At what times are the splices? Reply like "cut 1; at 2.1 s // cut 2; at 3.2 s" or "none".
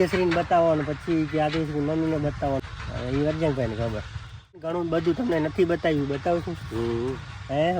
cut 1; at 2.6 s // cut 2; at 4.7 s